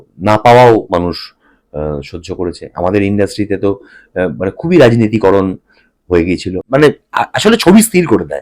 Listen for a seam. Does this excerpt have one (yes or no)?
yes